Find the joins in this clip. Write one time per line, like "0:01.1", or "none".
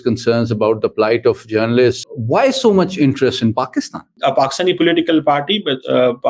0:02.0
0:04.1